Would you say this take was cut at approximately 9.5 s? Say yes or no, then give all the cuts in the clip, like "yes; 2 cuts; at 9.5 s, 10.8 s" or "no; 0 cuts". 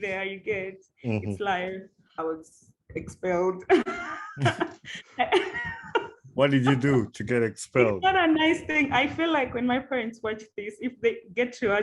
no; 1 cut; at 2.2 s